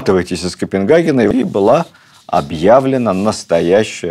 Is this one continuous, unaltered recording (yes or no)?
no